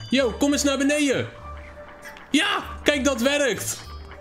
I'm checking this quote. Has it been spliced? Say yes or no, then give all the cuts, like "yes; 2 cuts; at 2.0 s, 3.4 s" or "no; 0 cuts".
no; 0 cuts